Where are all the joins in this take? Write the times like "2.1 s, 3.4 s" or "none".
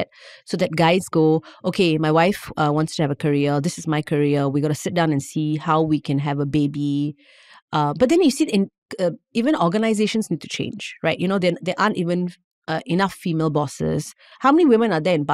none

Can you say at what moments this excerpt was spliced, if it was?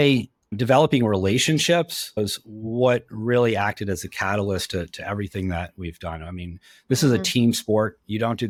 none

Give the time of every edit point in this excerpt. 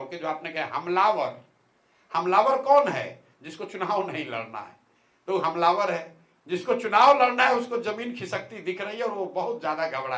none

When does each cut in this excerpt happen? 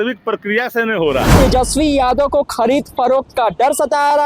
1.3 s

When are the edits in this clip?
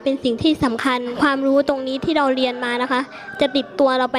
1.1 s

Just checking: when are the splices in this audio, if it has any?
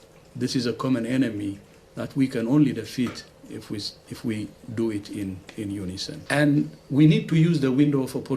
6.2 s

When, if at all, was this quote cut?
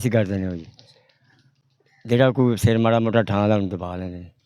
none

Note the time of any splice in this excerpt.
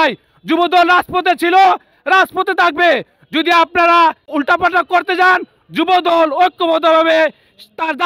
4.2 s

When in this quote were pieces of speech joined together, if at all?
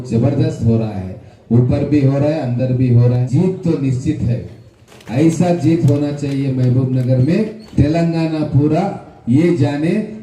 3.2 s, 4.8 s, 7.6 s

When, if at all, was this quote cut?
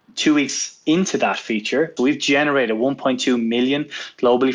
1.9 s

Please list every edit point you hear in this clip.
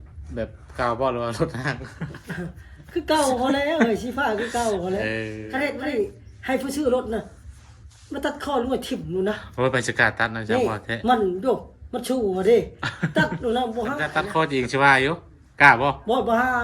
5.4 s, 14.2 s

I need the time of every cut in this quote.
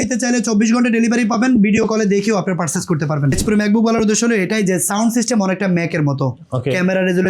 3.4 s

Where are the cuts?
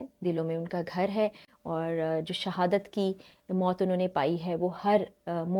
none

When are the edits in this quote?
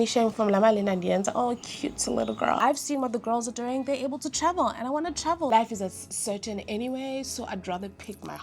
2.6 s, 5.5 s

